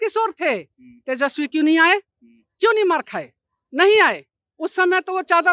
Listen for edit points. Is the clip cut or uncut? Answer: uncut